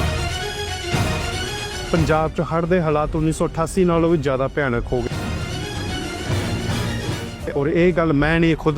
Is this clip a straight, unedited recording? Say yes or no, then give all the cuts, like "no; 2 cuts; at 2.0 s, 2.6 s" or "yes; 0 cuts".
yes; 0 cuts